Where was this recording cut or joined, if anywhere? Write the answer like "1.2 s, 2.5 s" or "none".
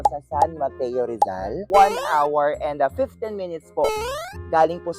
1.6 s